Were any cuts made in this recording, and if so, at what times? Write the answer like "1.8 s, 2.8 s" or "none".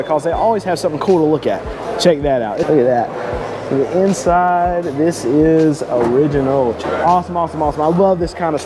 1.7 s, 2.7 s, 6.8 s